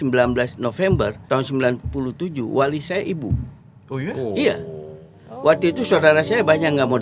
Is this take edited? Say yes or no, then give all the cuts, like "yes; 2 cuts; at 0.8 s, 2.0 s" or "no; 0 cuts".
yes; 1 cut; at 1.2 s